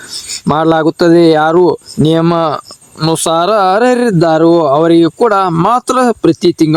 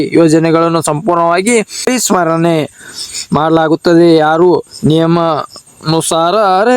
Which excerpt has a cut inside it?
second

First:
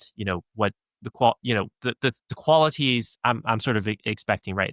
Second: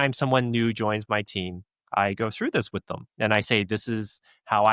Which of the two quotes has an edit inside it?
first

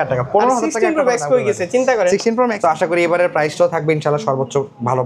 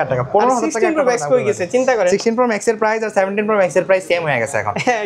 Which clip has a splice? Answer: first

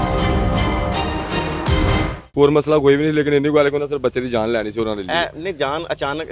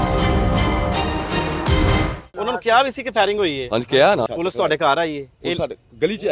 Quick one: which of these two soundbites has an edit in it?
second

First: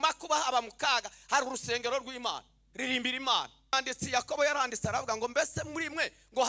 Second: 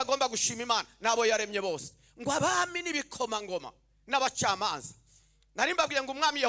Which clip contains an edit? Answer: first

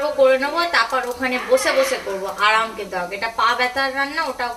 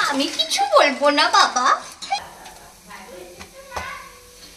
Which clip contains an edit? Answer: second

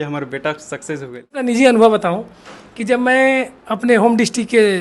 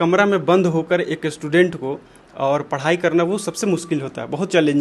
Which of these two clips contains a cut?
first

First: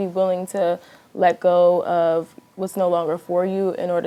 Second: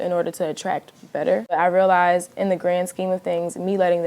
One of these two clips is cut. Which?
second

